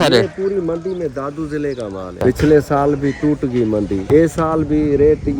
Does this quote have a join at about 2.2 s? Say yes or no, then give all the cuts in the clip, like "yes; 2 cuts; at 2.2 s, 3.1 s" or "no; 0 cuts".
yes; 1 cut; at 2.2 s